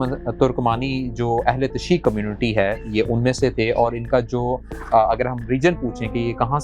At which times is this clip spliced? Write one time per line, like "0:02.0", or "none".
none